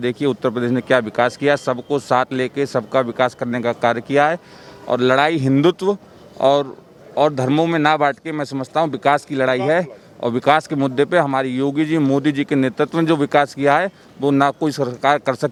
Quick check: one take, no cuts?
yes; 0 cuts

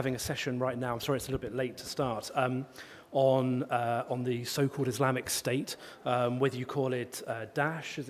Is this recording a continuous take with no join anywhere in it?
yes; 0 cuts

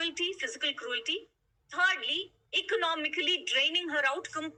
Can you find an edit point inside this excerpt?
no; 0 cuts

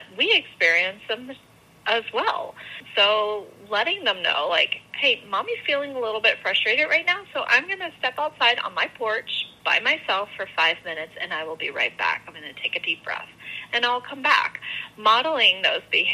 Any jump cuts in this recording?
yes; 1 cut; at 2.8 s

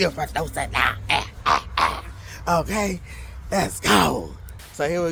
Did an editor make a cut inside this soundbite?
no; 0 cuts

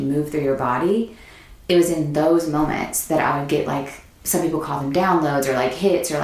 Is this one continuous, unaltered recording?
no; 1 cut; at 4.0 s

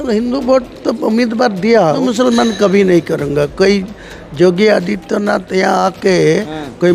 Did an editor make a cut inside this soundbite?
yes; 1 cut; at 2.0 s

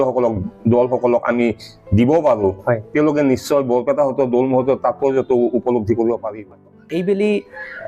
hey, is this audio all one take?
no; 1 cut; at 6.3 s

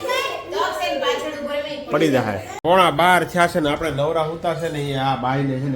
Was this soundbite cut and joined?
yes; 1 cut; at 2.5 s

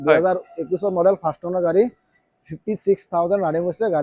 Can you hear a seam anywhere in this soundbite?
no; 0 cuts

